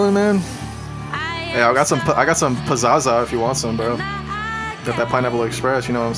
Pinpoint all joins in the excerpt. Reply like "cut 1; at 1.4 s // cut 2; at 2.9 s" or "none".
none